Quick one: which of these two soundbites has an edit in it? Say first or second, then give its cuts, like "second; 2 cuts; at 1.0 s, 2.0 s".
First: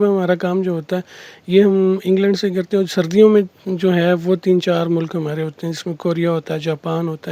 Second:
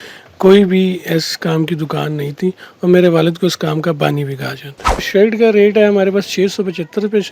second; 1 cut; at 5.1 s